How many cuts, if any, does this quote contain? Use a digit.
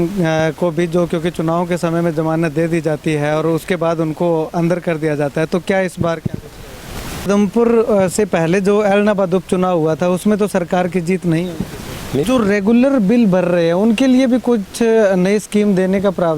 2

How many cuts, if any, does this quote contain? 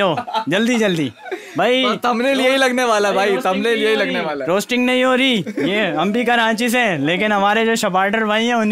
0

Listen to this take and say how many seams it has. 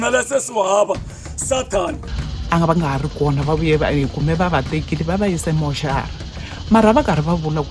1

